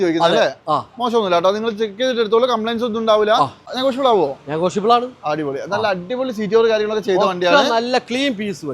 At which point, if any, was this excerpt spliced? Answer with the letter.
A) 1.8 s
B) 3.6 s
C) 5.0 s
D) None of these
B